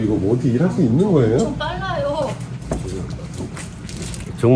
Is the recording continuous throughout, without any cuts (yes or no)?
yes